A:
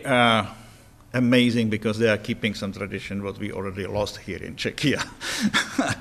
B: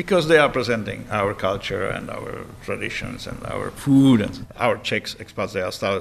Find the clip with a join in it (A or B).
B